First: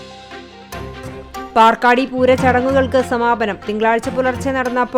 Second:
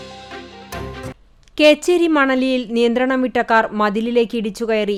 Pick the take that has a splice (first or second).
first